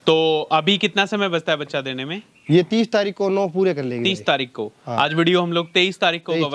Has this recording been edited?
no; 0 cuts

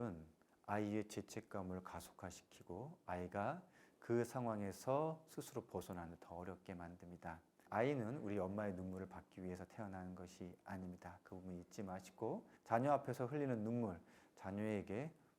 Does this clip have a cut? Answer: yes; 2 cuts; at 7.5 s, 12.5 s

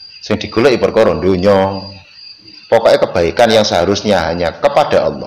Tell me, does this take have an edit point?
yes; 1 cut; at 2.5 s

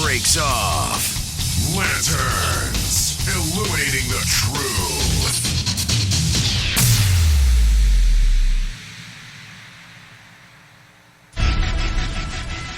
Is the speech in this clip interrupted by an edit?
yes; 1 cut; at 11.3 s

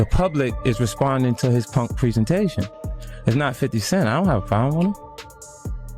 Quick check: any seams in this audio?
no; 0 cuts

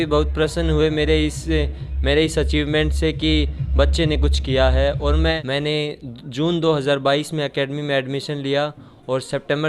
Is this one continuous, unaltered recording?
no; 1 cut; at 5.4 s

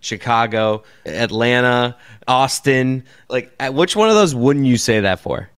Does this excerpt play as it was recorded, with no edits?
no; 3 cuts; at 1.0 s, 2.1 s, 3.2 s

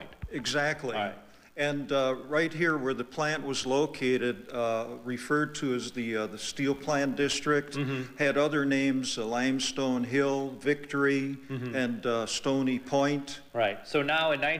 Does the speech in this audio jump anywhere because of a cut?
yes; 1 cut; at 3.3 s

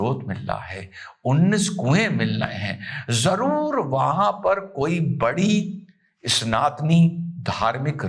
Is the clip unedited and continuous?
yes; 0 cuts

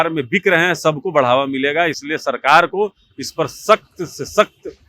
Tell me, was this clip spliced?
no; 0 cuts

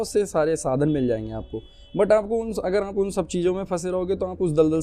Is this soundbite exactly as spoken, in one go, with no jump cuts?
yes; 0 cuts

